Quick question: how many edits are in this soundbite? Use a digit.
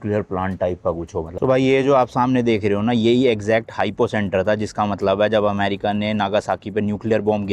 1